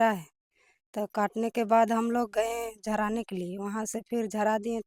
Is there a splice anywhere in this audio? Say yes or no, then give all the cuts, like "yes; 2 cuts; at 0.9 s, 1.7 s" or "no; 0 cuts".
no; 0 cuts